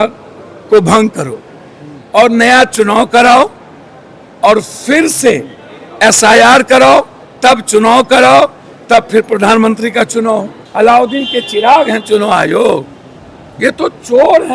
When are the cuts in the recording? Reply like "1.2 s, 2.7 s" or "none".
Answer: 10.6 s

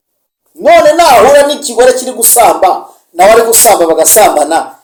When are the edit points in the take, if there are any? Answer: none

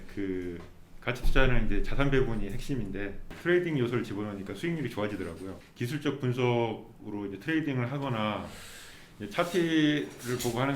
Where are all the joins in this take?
3.2 s, 5.5 s

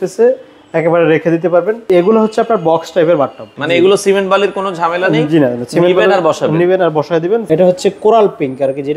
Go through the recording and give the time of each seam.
1.9 s, 3.6 s, 7.4 s

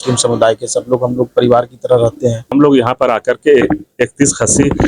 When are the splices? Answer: 2.5 s

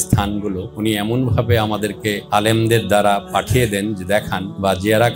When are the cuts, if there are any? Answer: none

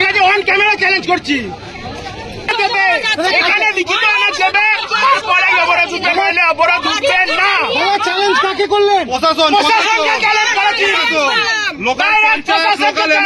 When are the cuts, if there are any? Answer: none

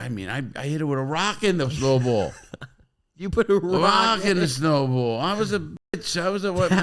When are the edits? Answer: none

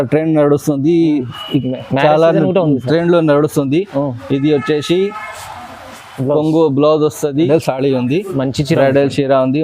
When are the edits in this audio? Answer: 7.5 s

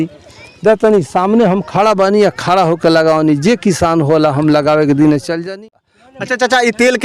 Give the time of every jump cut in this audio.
5.9 s

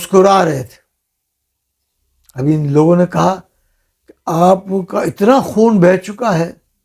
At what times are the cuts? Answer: none

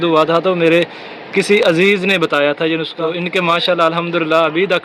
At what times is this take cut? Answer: 3.1 s

